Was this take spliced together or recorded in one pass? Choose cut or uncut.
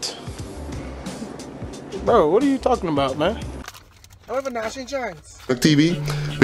cut